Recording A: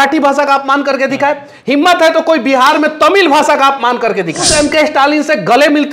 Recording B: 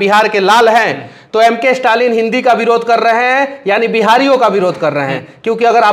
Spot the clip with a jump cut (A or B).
A